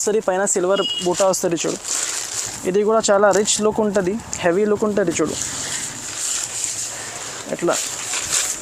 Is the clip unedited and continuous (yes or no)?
yes